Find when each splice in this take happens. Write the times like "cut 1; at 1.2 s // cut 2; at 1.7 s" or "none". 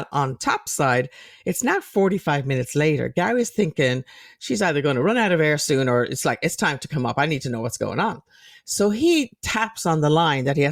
none

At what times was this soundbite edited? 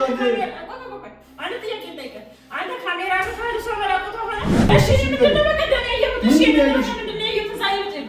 cut 1; at 4.7 s

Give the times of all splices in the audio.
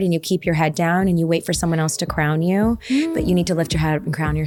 none

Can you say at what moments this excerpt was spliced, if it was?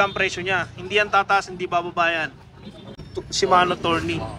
cut 1; at 3.0 s

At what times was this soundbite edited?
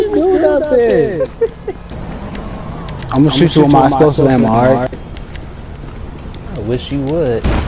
cut 1; at 1.8 s

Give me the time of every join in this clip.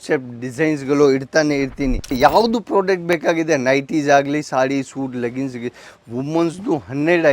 cut 1; at 2.2 s

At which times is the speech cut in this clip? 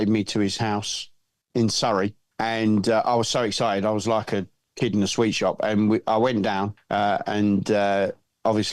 cut 1; at 2.2 s // cut 2; at 6.8 s

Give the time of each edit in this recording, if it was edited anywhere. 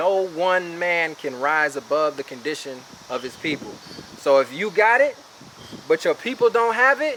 none

